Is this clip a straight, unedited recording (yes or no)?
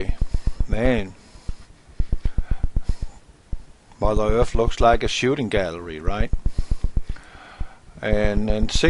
no